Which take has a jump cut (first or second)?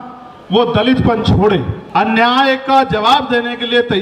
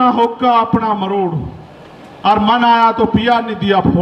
first